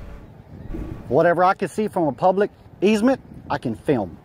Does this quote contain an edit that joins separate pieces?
yes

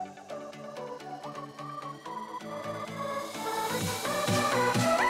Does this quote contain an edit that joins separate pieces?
no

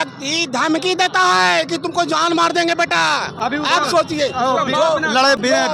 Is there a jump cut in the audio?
no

